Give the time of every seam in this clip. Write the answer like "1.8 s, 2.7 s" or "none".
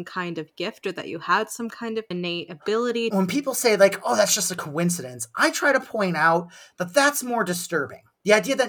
2.1 s, 3.1 s